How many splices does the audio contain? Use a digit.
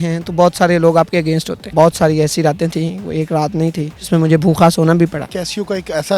3